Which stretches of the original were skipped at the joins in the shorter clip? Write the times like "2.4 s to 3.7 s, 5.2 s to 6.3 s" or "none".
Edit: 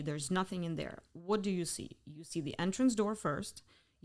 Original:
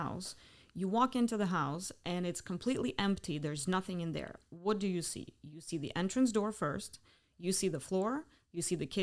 none